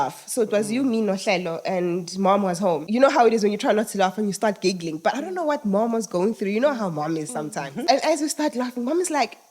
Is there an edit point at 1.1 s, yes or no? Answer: no